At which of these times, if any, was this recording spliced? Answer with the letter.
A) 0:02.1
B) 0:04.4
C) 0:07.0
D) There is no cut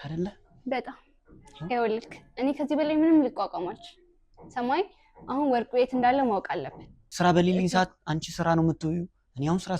C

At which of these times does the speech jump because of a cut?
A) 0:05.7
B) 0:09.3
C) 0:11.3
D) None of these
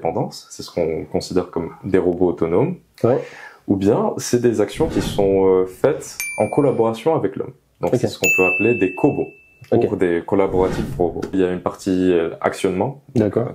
C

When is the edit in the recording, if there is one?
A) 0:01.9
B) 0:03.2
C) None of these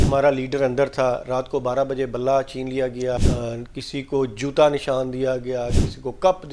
B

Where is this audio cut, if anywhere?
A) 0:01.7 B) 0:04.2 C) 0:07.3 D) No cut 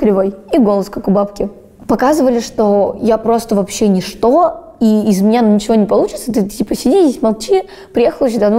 A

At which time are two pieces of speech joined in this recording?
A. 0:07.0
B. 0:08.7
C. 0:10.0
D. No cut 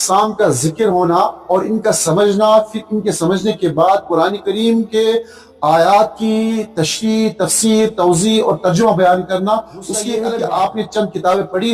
C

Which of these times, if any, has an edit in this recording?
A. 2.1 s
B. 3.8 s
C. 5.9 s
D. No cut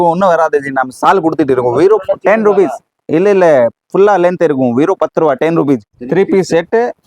C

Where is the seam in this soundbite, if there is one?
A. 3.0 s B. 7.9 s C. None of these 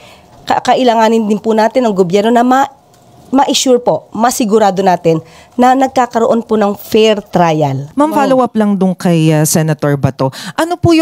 B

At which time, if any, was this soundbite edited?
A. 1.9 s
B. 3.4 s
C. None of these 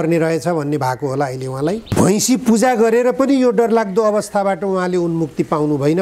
A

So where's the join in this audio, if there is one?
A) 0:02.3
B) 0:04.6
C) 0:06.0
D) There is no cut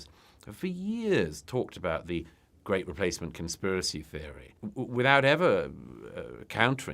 B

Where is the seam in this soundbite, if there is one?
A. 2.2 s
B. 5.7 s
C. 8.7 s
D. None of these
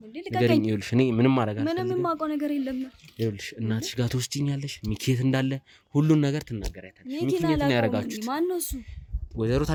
D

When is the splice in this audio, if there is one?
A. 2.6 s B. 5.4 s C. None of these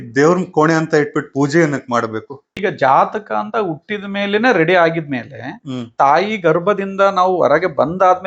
A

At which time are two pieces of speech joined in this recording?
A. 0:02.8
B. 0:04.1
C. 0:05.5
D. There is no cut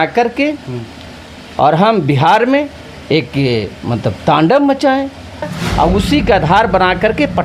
C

